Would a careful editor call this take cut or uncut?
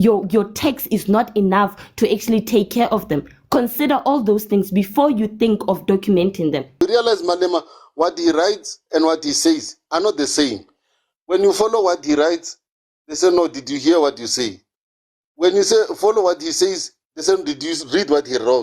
cut